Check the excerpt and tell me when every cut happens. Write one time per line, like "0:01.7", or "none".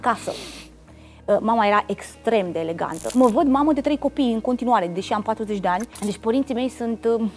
0:03.0
0:05.9